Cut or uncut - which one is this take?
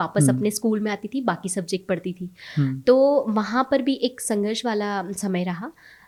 uncut